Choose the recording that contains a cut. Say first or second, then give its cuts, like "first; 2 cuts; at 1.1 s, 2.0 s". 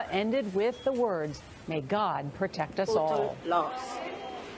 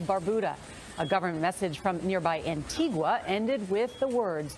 first; 1 cut; at 3.3 s